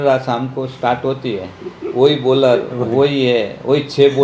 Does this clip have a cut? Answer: no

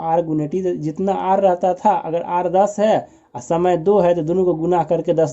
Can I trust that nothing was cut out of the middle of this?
yes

